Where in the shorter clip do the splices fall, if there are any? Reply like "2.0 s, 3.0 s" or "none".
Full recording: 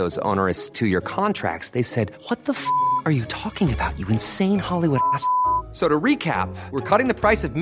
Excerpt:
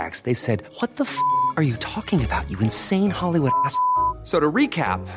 none